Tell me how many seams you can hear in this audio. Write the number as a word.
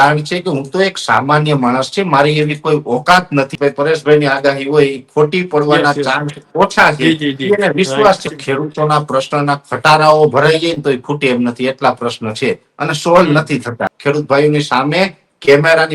three